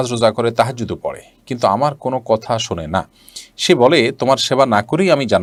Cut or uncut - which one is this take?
uncut